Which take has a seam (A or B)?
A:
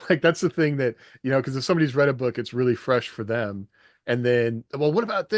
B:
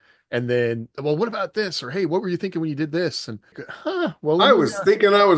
B